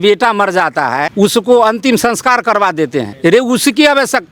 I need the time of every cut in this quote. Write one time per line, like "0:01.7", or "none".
0:01.1
0:03.1